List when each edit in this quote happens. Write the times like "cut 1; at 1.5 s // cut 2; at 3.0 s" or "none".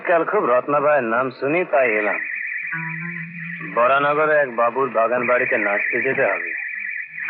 none